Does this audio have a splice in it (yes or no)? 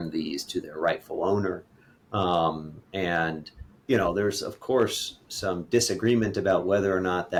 no